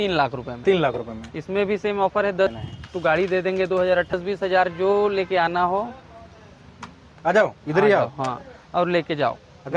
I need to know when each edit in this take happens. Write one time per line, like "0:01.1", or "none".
0:02.5
0:04.1